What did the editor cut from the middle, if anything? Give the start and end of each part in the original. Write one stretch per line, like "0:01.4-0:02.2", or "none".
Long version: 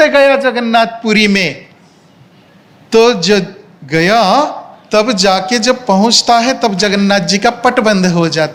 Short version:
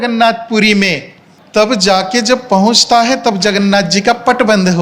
0:01.9-0:04.7